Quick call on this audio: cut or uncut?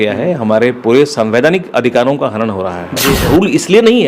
cut